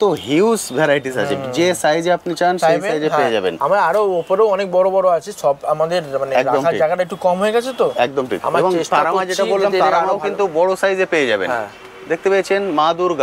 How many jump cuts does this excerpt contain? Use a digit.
0